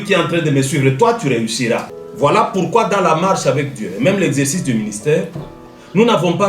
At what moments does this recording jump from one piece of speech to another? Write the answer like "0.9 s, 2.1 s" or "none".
1.9 s